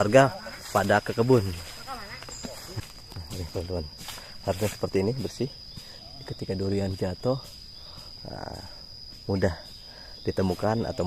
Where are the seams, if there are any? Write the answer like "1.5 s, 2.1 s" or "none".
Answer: 2.8 s